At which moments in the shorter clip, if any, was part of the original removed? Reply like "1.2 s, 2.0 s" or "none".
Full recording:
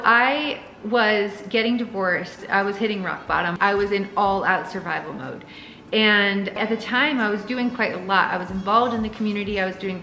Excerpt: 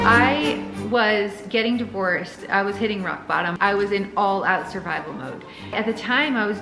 5.7 s